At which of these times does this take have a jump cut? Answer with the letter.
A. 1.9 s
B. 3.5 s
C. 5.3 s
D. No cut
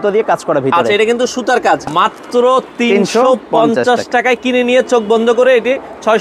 A